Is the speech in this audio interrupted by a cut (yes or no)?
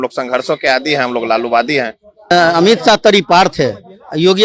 yes